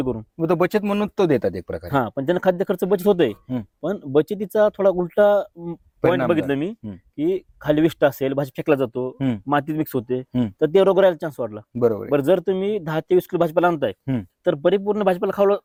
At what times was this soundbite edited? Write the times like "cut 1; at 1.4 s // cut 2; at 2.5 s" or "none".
none